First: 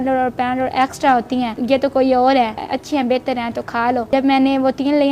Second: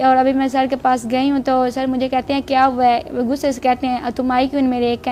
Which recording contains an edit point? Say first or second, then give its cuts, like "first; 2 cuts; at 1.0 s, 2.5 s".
first; 3 cuts; at 1.6 s, 2.7 s, 4.1 s